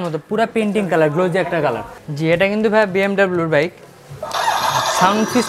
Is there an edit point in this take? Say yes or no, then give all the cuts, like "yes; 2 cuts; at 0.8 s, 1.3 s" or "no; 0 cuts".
yes; 1 cut; at 2.0 s